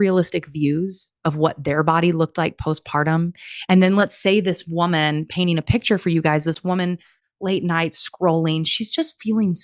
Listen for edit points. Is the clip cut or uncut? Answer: uncut